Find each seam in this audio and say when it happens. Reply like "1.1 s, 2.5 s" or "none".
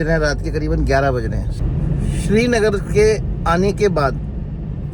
1.6 s